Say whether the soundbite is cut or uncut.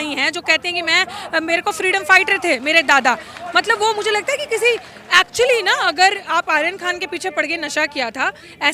uncut